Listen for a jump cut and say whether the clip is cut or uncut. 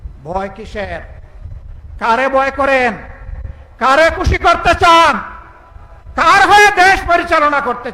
uncut